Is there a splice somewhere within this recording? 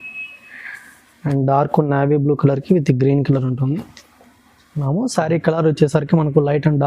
yes; 1 cut; at 4.7 s

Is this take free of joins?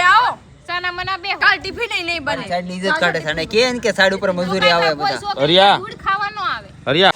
yes; 0 cuts

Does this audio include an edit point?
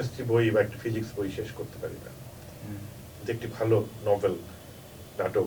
no; 0 cuts

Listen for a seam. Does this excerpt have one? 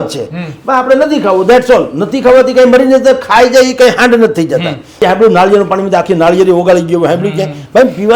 yes; 1 cut; at 5.0 s

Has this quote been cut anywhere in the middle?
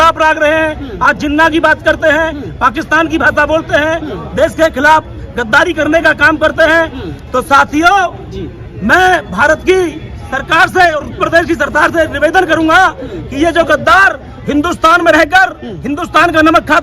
no; 0 cuts

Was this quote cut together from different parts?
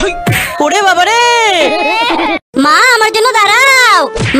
yes; 1 cut; at 2.4 s

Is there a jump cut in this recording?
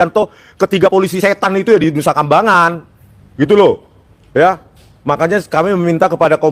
no; 0 cuts

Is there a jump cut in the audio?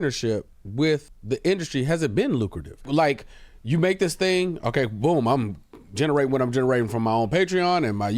yes; 2 cuts; at 1.1 s, 2.8 s

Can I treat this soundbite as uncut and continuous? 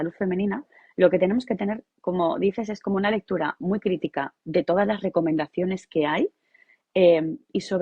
yes; 0 cuts

